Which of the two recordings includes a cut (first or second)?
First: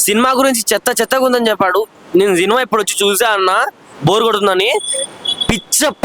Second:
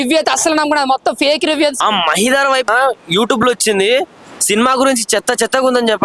second